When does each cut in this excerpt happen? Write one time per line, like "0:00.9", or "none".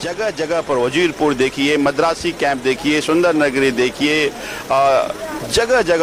none